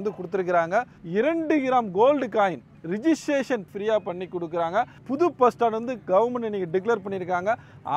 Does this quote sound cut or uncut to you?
cut